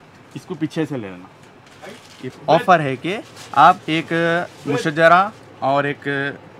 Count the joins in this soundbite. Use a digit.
1